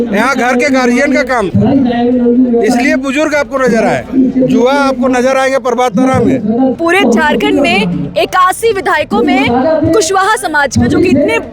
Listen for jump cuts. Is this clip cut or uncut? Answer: cut